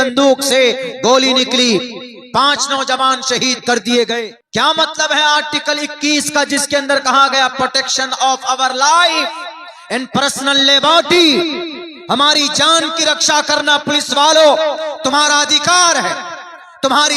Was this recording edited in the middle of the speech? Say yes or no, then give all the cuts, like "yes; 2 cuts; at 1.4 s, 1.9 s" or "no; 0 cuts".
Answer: yes; 1 cut; at 4.3 s